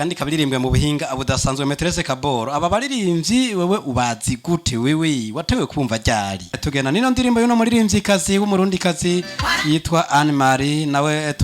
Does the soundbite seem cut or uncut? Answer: cut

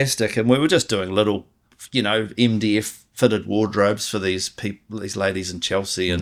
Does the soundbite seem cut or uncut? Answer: uncut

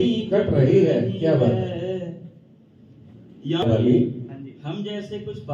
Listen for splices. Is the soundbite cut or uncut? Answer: cut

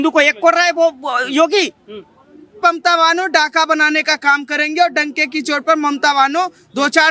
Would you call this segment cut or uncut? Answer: cut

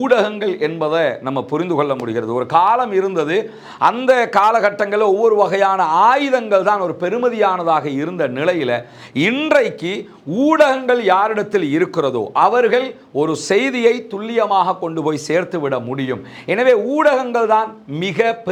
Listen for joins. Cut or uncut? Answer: uncut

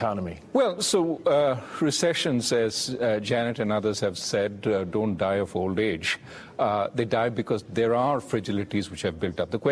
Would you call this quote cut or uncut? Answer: cut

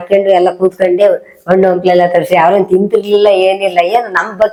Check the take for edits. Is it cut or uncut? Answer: uncut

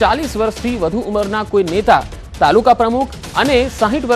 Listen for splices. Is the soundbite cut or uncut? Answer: cut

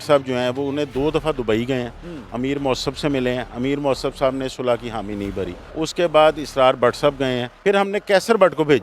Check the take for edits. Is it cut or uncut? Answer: cut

